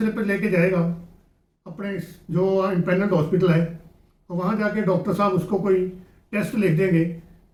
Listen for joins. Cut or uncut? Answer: uncut